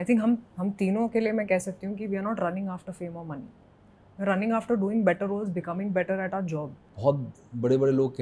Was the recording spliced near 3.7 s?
no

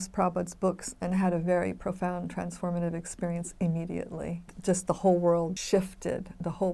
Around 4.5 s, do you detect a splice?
yes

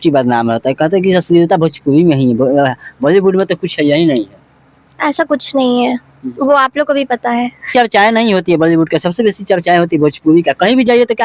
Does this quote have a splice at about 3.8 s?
no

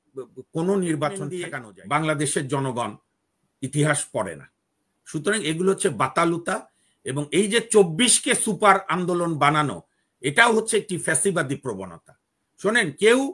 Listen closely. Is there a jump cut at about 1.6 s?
yes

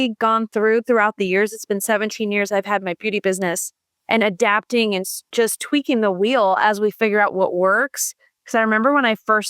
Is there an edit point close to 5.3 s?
yes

